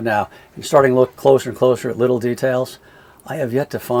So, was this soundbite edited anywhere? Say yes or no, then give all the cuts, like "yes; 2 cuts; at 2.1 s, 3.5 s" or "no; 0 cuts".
no; 0 cuts